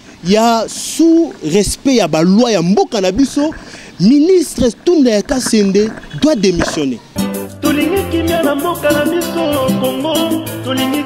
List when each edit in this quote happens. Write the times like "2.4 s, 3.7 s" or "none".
7.1 s